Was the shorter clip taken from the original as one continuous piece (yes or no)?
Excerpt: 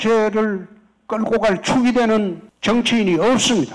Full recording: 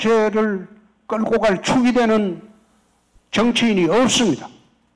no